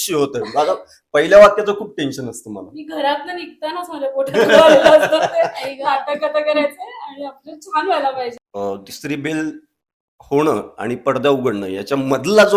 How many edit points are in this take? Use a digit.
1